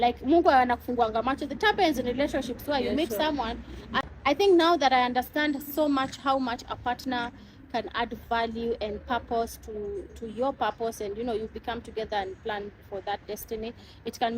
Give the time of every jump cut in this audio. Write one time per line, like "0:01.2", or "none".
0:03.9